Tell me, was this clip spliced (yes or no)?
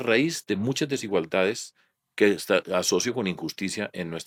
no